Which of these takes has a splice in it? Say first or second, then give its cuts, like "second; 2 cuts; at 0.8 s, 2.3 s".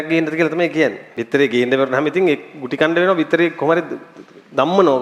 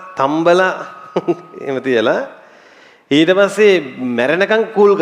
first; 1 cut; at 1.1 s